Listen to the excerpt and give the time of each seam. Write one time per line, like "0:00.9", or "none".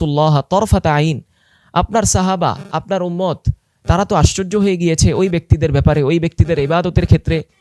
none